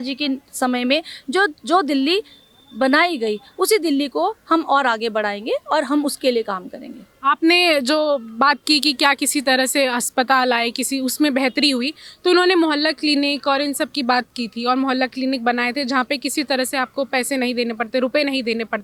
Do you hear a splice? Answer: no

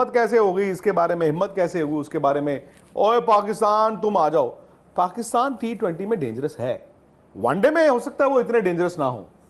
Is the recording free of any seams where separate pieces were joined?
yes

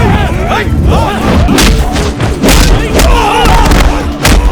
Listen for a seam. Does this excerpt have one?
yes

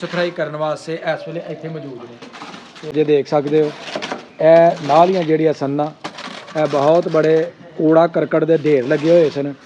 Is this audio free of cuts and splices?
no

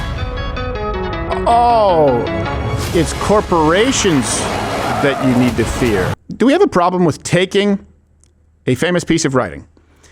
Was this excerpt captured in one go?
no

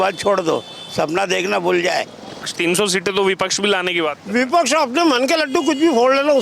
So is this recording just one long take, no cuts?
no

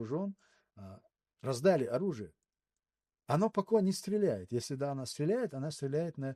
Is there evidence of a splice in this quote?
no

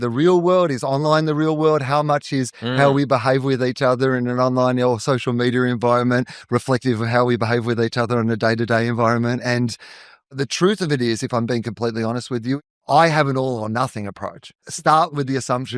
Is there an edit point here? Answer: yes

